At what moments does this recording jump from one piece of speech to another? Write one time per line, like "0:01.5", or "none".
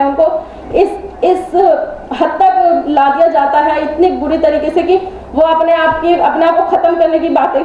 none